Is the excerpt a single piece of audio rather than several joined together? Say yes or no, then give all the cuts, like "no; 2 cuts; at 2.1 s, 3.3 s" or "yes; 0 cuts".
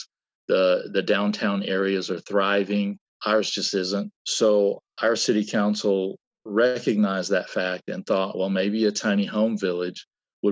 no; 2 cuts; at 3.1 s, 4.2 s